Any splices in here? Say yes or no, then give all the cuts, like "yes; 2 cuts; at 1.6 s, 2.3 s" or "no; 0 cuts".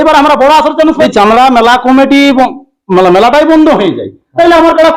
yes; 1 cut; at 1.1 s